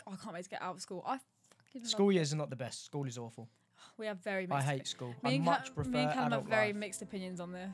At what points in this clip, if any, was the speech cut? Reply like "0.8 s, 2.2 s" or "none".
none